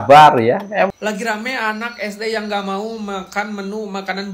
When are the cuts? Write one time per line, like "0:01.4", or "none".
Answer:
0:00.9